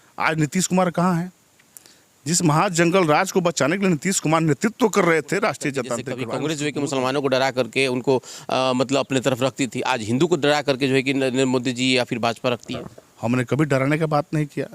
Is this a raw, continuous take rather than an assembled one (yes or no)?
no